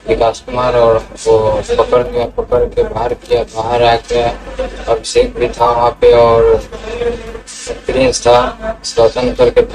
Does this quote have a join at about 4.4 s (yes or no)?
no